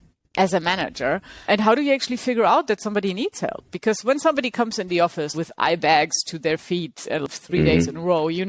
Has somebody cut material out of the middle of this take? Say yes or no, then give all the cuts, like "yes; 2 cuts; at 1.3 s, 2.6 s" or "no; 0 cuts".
yes; 2 cuts; at 5.3 s, 7.2 s